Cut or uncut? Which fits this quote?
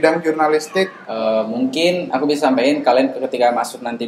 cut